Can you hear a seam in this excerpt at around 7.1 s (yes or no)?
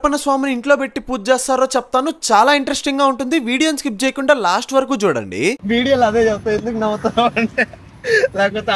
no